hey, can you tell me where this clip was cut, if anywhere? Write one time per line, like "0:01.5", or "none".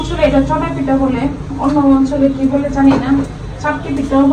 none